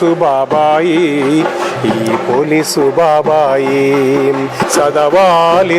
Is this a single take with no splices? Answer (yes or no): no